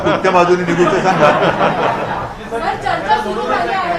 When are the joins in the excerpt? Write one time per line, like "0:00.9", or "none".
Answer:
none